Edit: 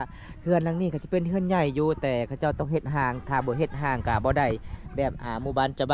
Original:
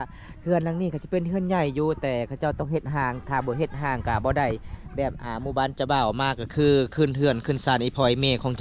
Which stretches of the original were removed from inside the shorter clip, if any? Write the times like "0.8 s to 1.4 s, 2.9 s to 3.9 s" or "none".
none